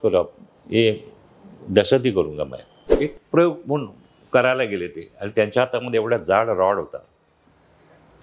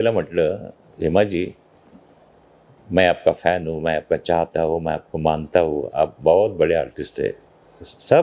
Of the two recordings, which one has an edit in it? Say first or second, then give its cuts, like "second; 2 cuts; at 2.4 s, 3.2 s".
first; 1 cut; at 2.8 s